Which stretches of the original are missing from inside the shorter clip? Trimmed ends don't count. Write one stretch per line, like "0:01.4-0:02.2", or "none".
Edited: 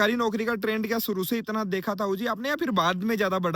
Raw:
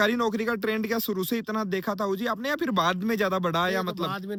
none

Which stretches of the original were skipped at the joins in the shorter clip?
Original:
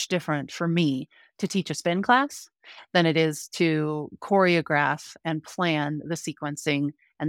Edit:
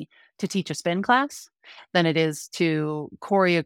none

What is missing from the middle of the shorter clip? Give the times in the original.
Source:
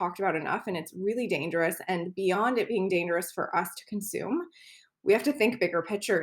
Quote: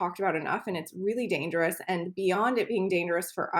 none

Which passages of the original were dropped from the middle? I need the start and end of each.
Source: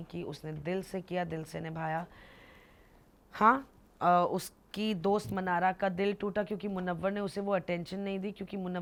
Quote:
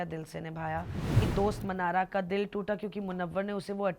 0:02.5-0:04.9

